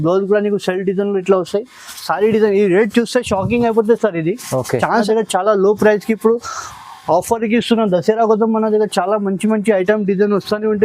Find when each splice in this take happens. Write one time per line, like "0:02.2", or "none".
0:05.0